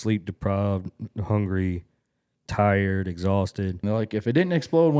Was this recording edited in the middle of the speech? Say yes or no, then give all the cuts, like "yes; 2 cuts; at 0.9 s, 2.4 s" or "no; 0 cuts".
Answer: yes; 1 cut; at 3.8 s